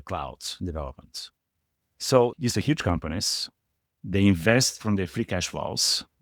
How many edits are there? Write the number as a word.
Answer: one